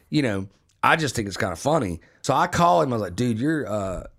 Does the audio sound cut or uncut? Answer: cut